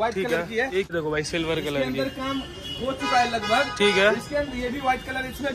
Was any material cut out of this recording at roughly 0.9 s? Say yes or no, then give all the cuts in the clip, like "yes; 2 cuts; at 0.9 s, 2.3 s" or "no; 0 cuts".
yes; 1 cut; at 0.9 s